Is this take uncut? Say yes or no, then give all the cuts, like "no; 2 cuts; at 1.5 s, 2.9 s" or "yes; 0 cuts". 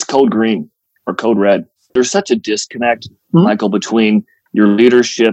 no; 1 cut; at 1.9 s